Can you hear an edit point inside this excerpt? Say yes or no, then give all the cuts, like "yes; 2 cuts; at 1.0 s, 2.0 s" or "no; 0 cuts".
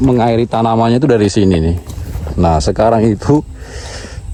no; 0 cuts